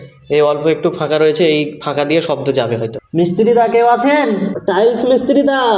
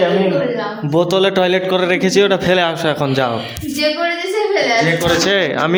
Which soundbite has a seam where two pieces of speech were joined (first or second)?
first